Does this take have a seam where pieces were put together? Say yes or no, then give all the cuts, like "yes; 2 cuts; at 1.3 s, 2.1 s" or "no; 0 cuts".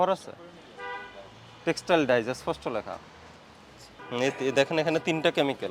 yes; 1 cut; at 3.9 s